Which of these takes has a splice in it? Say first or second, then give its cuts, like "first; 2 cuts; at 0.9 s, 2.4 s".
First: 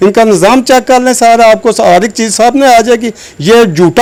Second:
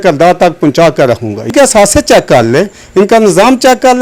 second; 1 cut; at 1.5 s